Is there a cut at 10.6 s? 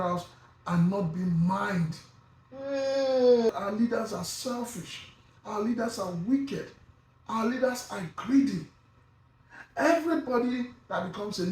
no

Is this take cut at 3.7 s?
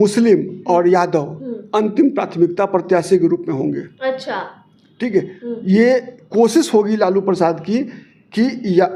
no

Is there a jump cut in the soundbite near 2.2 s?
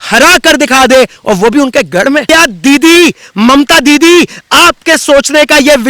yes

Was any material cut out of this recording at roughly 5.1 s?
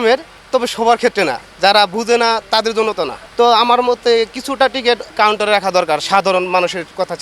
yes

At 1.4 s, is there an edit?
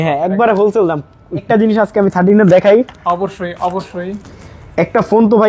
yes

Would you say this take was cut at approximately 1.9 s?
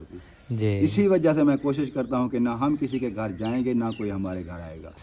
no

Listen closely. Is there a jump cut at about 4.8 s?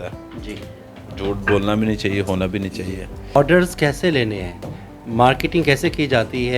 no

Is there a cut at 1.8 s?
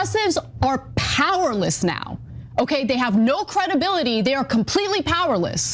no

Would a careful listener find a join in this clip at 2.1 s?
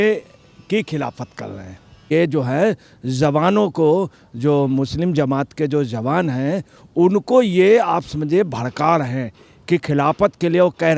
yes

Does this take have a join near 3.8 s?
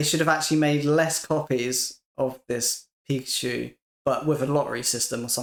no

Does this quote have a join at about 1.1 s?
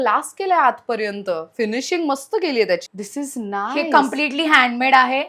no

